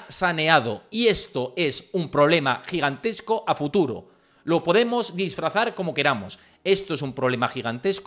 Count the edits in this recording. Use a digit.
0